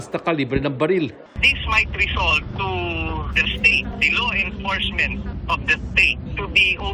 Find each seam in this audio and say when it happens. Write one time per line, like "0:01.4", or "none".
0:02.5